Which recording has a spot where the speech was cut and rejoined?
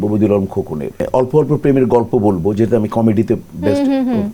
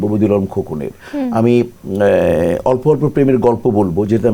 first; 1 cut; at 1.0 s

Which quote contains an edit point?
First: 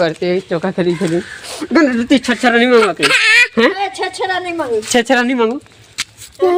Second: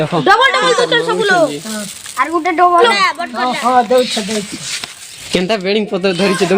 second; 2 cuts; at 2.8 s, 5.1 s

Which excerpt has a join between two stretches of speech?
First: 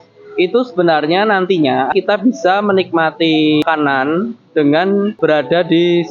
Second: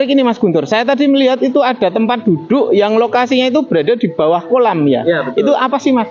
first; 3 cuts; at 1.9 s, 3.6 s, 5.1 s

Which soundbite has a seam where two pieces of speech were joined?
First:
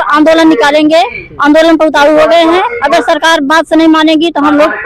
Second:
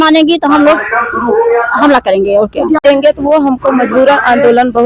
second; 1 cut; at 2.8 s

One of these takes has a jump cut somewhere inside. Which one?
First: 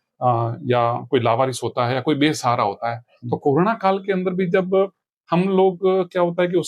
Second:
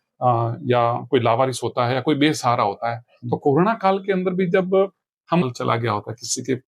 second; 1 cut; at 5.4 s

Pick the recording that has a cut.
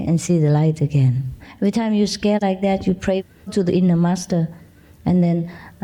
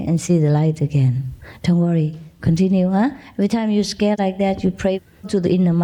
first; 1 cut; at 1.5 s

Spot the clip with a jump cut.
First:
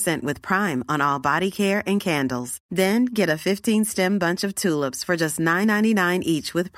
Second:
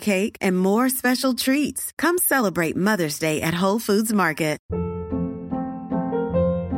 second; 1 cut; at 4.6 s

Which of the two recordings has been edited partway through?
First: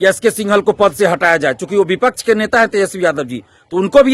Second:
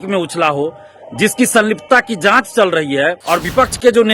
second; 1 cut; at 3.2 s

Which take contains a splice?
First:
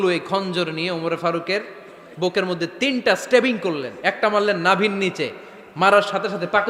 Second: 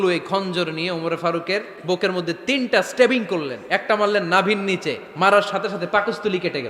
second; 2 cuts; at 1.7 s, 5.0 s

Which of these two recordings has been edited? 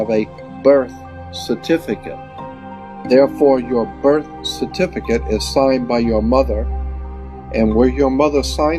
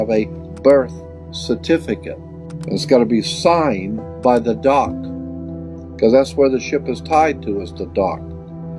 first; 1 cut; at 2.6 s

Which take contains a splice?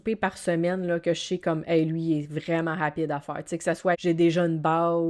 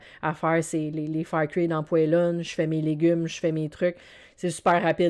first; 1 cut; at 3.9 s

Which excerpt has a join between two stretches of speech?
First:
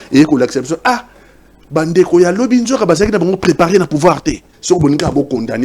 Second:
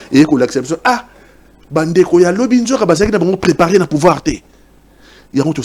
first; 1 cut; at 4.5 s

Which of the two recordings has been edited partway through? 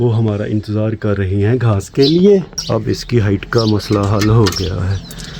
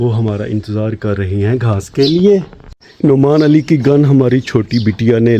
first; 1 cut; at 2.6 s

